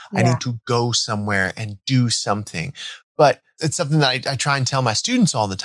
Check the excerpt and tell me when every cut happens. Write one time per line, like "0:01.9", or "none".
0:03.5